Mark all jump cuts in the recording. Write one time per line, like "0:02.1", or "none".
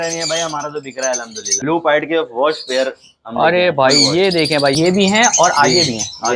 0:01.5
0:04.8